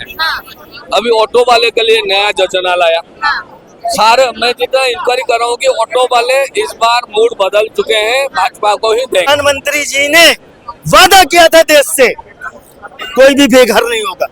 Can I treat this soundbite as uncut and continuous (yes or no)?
no